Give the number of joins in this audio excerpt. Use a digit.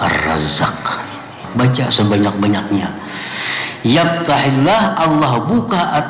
1